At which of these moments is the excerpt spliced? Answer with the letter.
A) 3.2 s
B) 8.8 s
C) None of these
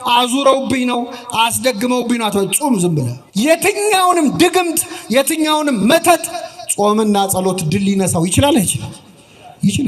A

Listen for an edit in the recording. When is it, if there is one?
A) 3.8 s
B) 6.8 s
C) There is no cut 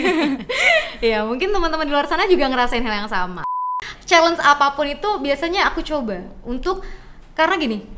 A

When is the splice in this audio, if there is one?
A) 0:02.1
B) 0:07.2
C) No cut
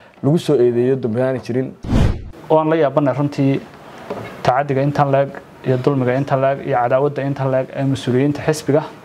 A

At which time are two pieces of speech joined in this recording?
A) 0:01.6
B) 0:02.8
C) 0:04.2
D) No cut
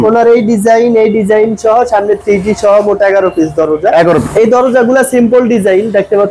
C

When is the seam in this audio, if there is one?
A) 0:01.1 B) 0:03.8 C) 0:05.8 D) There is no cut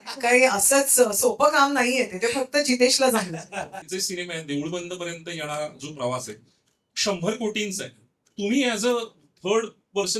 B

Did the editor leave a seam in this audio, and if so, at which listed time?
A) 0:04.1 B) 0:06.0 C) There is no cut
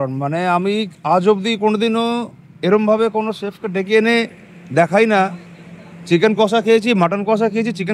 C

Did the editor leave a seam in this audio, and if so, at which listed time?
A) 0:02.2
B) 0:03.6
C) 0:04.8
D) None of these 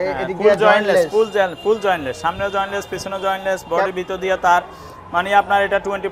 D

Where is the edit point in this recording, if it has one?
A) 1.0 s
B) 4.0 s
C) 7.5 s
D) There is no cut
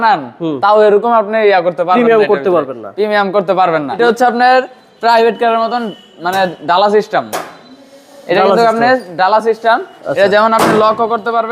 B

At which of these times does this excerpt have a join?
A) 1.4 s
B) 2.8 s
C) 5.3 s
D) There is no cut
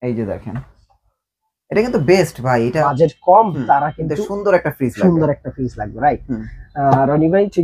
B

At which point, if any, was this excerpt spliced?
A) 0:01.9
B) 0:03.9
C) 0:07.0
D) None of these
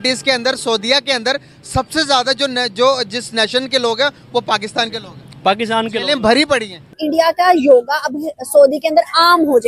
C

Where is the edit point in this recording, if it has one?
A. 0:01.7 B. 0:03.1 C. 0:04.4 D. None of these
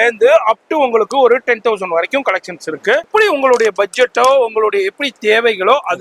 B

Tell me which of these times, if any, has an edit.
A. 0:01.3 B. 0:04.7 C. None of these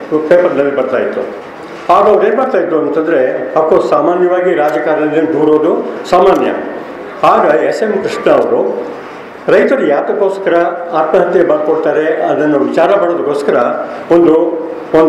C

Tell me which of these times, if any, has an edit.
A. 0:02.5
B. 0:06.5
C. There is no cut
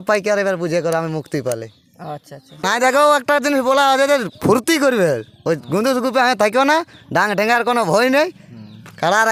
C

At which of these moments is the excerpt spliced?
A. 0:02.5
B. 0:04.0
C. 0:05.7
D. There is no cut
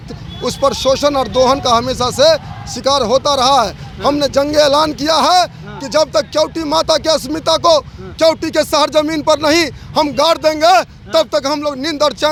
D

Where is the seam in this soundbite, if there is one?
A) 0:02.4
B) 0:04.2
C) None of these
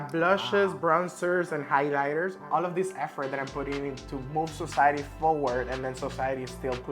A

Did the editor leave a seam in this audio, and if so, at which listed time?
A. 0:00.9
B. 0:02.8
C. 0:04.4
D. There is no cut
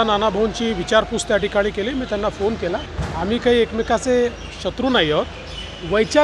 B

